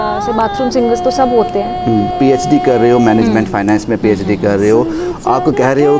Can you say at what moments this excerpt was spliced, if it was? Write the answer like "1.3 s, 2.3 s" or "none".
2.1 s

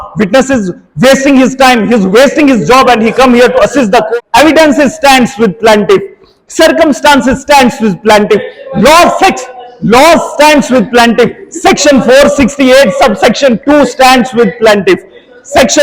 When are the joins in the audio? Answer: 4.1 s

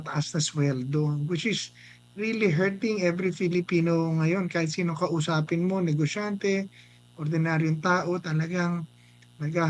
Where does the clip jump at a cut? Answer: none

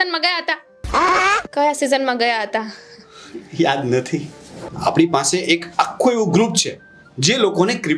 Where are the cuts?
4.6 s

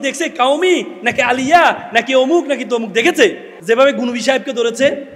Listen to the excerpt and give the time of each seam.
3.5 s

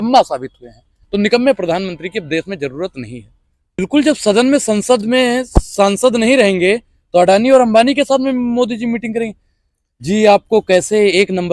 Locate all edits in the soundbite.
3.8 s

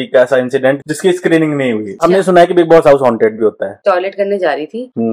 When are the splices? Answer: 0.8 s, 2.0 s, 3.8 s

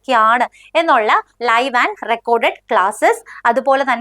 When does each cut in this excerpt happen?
1.3 s

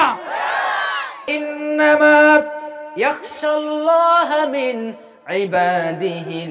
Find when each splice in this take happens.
1.3 s

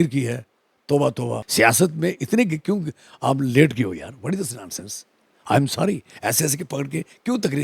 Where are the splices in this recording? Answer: 1.5 s

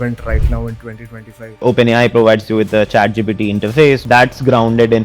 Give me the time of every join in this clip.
1.6 s, 4.0 s

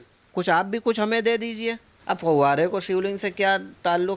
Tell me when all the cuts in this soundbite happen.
1.9 s

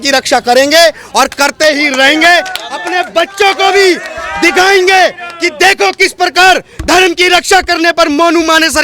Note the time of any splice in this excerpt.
none

